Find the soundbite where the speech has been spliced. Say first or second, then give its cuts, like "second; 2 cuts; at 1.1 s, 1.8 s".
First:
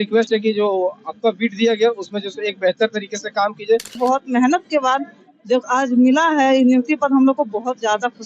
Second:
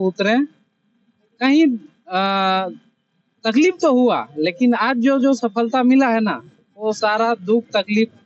first; 1 cut; at 4.0 s